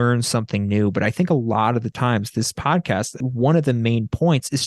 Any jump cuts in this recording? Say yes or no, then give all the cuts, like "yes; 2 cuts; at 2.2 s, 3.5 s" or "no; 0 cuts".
yes; 1 cut; at 3.2 s